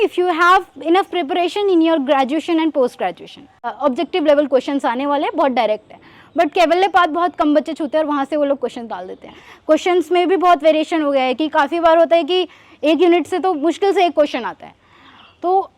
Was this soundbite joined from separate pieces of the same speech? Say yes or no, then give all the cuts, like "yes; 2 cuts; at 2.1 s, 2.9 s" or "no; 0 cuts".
yes; 2 cuts; at 3.7 s, 9.5 s